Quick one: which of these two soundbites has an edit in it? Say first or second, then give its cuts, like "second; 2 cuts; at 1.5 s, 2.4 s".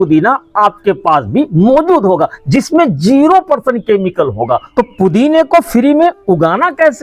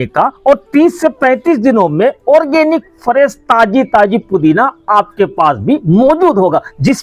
first; 1 cut; at 4.7 s